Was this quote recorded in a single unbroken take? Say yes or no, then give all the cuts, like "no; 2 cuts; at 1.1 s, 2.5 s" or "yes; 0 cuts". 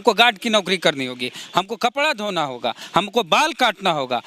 yes; 0 cuts